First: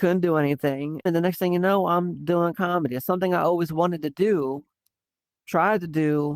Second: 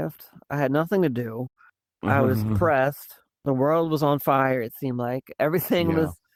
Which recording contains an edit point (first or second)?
first